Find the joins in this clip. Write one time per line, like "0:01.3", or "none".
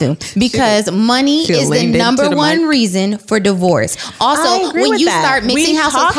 none